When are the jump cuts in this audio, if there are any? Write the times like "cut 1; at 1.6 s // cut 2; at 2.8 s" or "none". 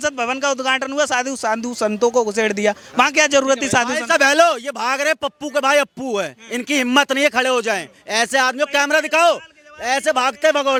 none